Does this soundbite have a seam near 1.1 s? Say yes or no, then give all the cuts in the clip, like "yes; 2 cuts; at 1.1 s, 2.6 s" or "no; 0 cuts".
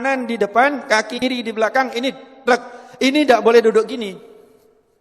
yes; 1 cut; at 1.1 s